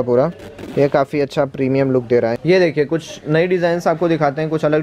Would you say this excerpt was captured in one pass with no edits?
no; 1 cut; at 2.4 s

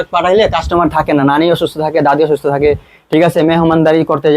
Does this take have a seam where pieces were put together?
no; 0 cuts

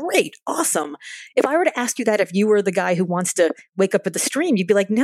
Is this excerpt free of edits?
yes; 0 cuts

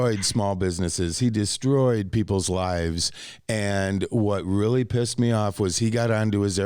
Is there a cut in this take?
no; 0 cuts

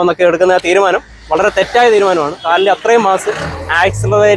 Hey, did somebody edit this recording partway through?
yes; 1 cut; at 2.4 s

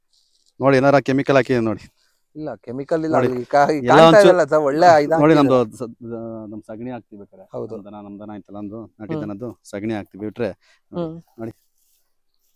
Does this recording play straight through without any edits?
yes; 0 cuts

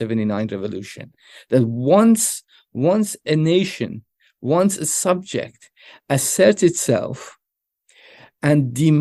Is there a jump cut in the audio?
no; 0 cuts

